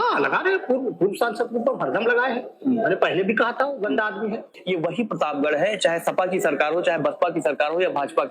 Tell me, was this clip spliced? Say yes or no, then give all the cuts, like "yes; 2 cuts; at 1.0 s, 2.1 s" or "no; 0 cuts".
yes; 1 cut; at 4.5 s